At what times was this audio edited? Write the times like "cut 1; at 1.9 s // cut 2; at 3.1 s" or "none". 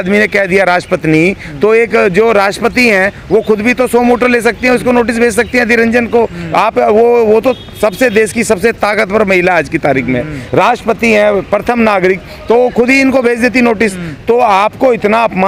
none